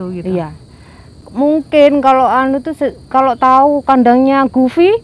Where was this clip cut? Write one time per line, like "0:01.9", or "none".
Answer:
0:01.2